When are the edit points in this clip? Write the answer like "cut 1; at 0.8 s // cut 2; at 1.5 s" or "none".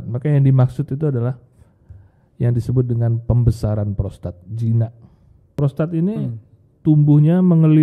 cut 1; at 5.6 s